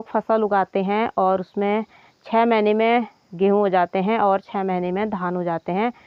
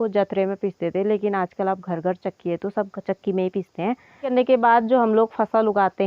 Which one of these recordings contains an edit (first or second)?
second